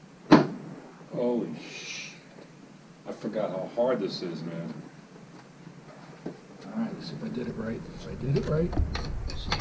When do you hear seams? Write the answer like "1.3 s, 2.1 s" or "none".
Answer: 5.9 s